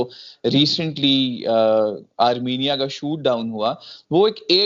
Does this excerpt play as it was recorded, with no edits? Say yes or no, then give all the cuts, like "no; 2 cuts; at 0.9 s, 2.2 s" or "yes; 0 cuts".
yes; 0 cuts